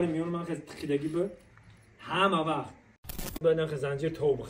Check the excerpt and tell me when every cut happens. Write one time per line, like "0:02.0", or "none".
0:03.4